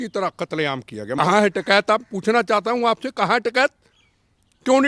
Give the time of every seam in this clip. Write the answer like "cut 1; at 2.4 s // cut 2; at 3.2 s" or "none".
cut 1; at 1.1 s